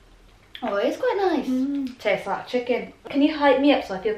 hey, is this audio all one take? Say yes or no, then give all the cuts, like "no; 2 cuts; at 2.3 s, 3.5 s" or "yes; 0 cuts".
no; 1 cut; at 3.0 s